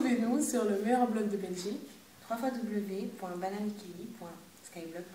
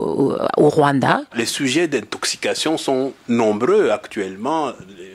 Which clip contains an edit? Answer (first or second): second